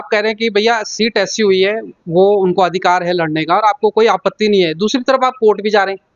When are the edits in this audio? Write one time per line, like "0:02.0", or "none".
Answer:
none